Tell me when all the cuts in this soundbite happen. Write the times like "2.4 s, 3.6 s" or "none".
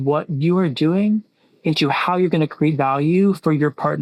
none